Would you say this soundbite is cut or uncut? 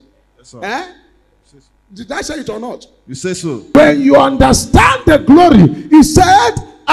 cut